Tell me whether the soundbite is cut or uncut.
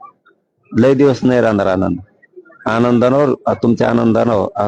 uncut